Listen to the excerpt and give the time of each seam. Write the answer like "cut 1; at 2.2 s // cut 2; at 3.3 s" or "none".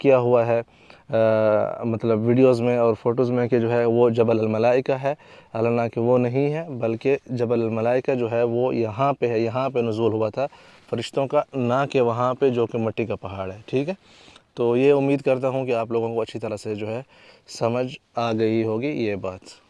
none

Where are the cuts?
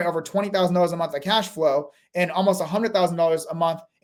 none

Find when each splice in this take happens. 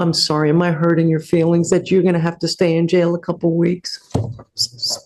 none

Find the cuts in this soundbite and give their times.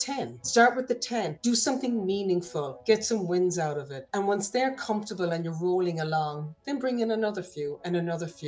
none

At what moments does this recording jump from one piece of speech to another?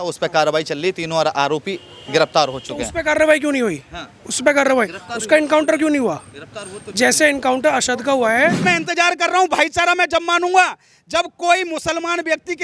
cut 1; at 8.6 s

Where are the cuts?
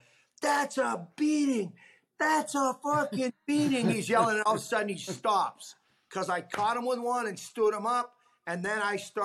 cut 1; at 5.8 s

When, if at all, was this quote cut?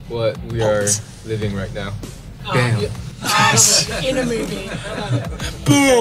none

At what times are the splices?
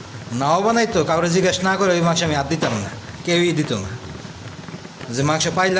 none

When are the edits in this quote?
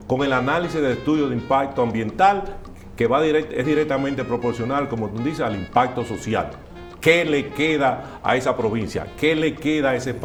none

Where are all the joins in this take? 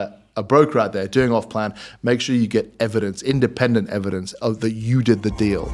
none

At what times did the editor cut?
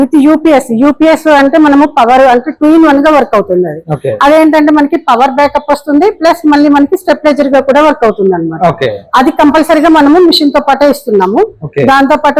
none

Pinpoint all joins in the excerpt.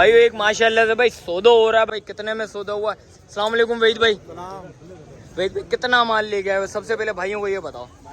cut 1; at 1.9 s

